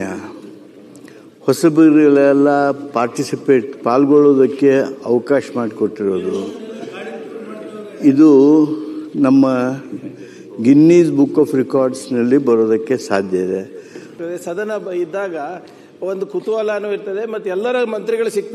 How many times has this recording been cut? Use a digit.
1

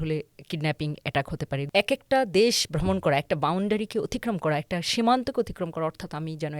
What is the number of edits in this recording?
1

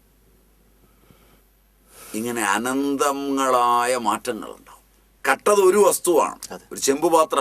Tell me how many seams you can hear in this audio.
1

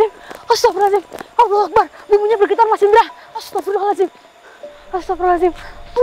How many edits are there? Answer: 0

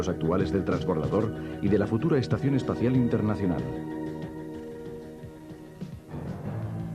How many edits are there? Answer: 1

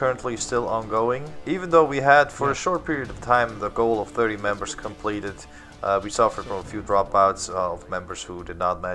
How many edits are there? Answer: 1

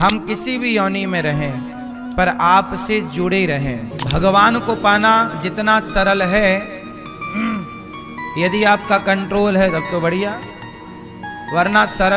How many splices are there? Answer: 1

